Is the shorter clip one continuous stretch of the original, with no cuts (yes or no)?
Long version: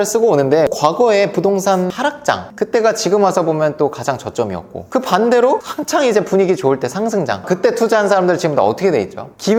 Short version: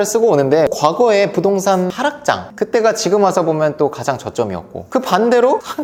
yes